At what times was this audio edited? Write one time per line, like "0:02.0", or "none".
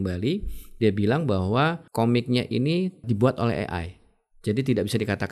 0:01.8
0:03.0